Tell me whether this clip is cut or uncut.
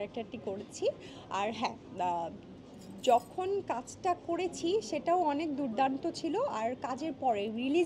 uncut